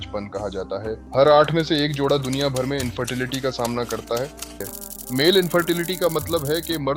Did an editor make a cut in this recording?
yes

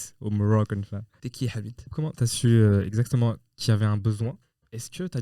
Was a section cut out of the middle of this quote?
yes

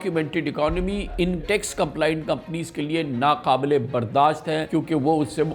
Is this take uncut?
no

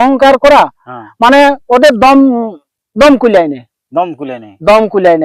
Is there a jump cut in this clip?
no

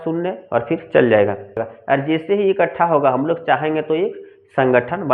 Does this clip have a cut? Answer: yes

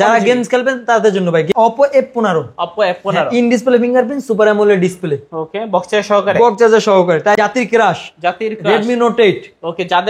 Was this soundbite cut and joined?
yes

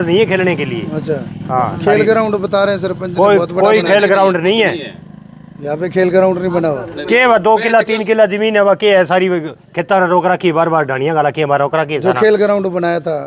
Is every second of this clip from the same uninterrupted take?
yes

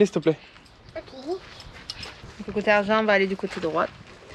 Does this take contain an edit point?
no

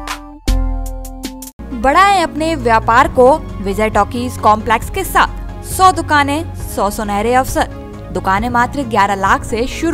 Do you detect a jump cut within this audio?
no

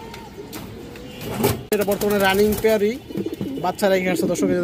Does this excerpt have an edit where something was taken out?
yes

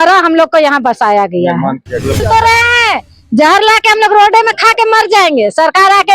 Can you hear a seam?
yes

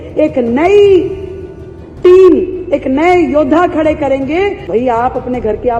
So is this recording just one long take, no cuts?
no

